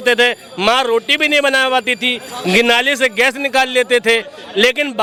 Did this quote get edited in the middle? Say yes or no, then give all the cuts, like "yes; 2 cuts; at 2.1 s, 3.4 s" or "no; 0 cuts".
no; 0 cuts